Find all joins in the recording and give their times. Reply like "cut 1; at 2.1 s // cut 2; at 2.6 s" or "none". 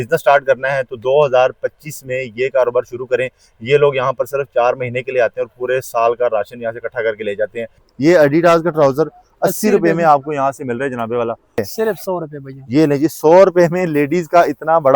cut 1; at 7.8 s // cut 2; at 11.6 s